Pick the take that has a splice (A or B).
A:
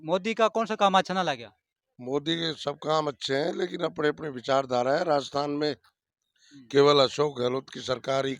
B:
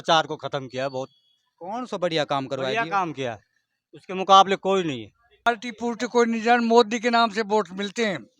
B